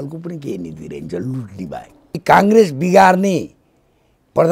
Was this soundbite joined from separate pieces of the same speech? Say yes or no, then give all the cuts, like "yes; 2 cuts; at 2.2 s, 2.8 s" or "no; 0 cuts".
yes; 1 cut; at 2.2 s